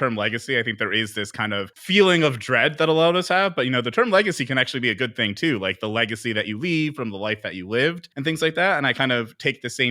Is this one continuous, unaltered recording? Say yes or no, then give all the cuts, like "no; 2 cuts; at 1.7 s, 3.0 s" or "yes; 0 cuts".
no; 2 cuts; at 1.8 s, 8.1 s